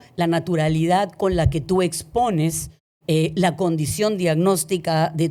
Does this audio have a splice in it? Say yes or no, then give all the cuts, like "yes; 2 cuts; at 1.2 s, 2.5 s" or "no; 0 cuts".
no; 0 cuts